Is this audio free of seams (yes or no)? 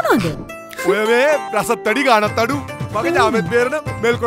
yes